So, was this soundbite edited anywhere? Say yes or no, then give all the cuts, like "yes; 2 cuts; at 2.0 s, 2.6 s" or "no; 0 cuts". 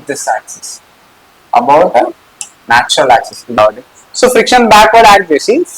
yes; 1 cut; at 3.6 s